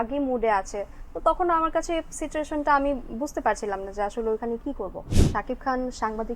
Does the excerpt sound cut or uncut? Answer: cut